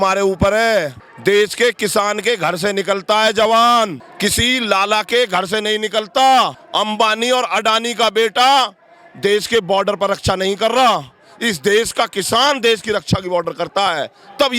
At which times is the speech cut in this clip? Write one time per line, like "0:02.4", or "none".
0:01.0
0:04.0
0:06.6